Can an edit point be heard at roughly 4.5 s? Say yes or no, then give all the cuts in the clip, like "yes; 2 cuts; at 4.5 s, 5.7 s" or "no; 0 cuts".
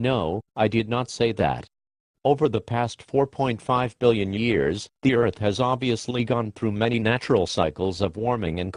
no; 1 cut; at 6.8 s